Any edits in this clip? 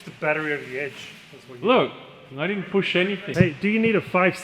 yes; 1 cut; at 3.2 s

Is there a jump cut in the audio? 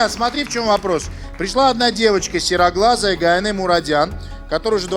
no; 0 cuts

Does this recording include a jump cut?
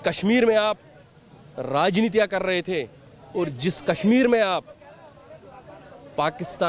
no; 0 cuts

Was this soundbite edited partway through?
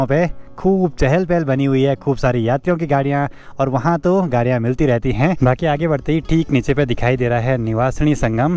no; 0 cuts

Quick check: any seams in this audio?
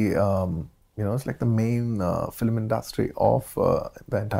no; 0 cuts

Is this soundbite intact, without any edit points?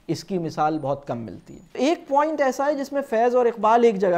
no; 1 cut; at 1.8 s

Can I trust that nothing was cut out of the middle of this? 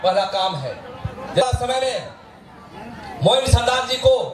no; 1 cut; at 1.4 s

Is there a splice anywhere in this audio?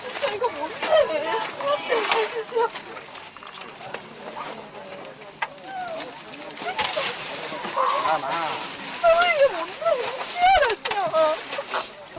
no; 0 cuts

